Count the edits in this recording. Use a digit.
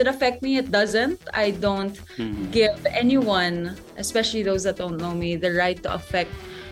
0